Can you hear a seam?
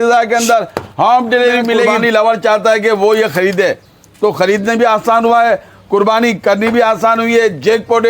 yes; 1 cut; at 1.9 s

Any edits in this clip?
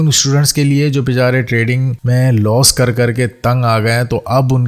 yes; 1 cut; at 1.9 s

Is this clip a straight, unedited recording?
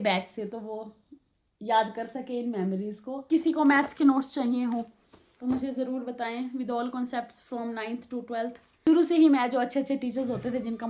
no; 2 cuts; at 3.2 s, 8.7 s

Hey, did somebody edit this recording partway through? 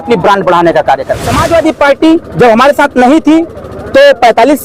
yes; 1 cut; at 1.3 s

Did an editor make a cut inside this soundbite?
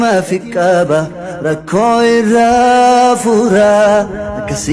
yes; 1 cut; at 1.2 s

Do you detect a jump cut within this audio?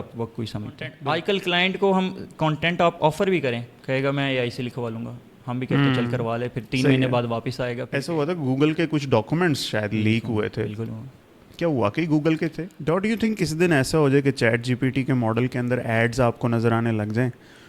yes; 3 cuts; at 0.9 s, 7.9 s, 12.7 s

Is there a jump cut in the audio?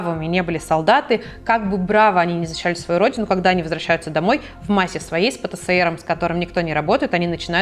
no; 0 cuts

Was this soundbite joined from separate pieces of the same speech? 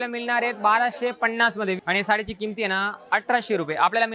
yes; 1 cut; at 1.8 s

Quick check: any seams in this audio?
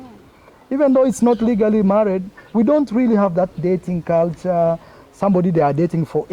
no; 0 cuts

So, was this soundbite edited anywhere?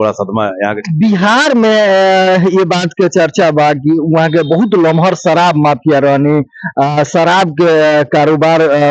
no; 0 cuts

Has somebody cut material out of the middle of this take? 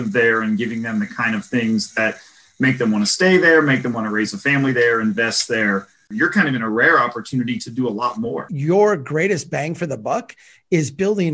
yes; 2 cuts; at 6.1 s, 8.5 s

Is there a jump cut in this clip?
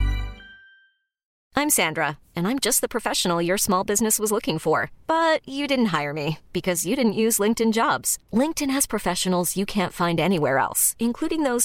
yes; 1 cut; at 1.4 s

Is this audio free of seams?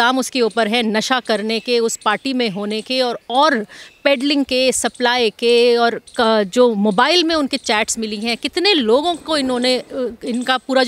yes; 0 cuts

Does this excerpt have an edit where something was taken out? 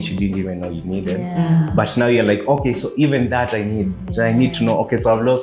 no; 0 cuts

